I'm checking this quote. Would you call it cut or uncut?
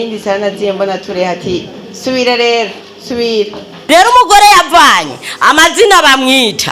cut